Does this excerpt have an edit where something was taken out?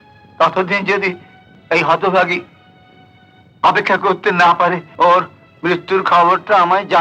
yes; 1 cut; at 4.9 s

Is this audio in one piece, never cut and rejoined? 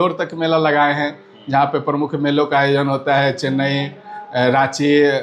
yes; 0 cuts

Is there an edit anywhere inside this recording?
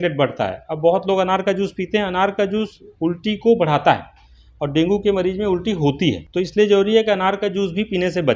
yes; 1 cut; at 6.2 s

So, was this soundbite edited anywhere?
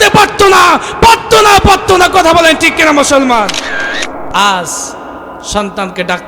yes; 1 cut; at 4.2 s

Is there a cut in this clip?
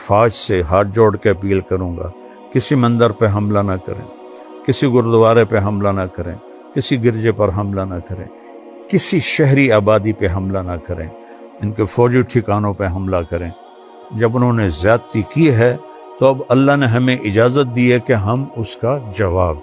no; 0 cuts

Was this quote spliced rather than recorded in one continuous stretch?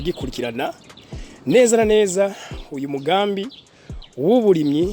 no; 0 cuts

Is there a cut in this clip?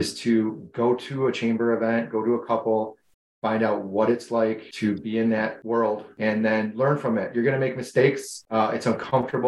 yes; 3 cuts; at 4.7 s, 6.1 s, 8.3 s

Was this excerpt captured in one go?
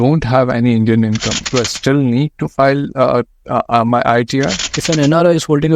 no; 2 cuts; at 1.3 s, 4.7 s

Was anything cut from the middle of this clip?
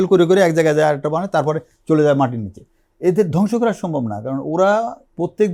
no; 0 cuts

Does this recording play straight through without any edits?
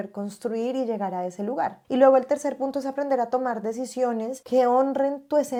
yes; 0 cuts

